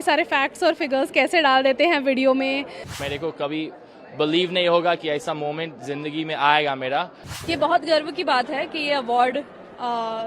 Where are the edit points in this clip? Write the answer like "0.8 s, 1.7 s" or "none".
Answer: 3.0 s, 7.3 s